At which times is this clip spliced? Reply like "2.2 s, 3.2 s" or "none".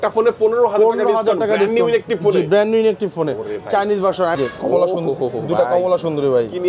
4.4 s